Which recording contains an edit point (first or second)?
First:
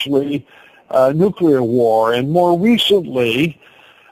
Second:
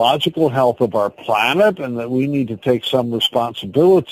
second